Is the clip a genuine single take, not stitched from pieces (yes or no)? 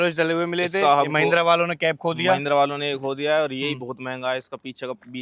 yes